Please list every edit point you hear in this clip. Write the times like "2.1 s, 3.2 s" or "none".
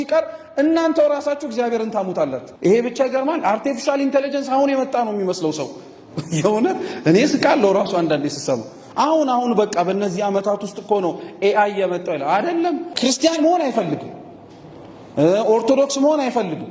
2.4 s, 12.9 s